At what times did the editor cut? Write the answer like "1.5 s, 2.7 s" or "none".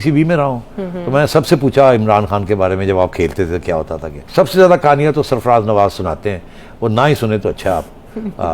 4.2 s